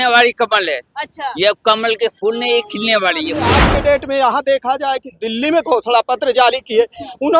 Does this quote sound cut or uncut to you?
cut